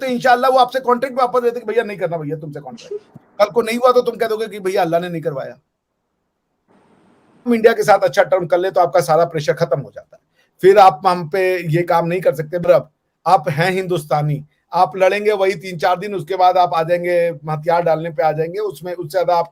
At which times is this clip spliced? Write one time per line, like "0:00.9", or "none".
0:07.5
0:12.7